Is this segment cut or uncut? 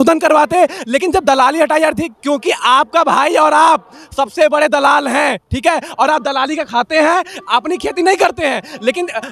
uncut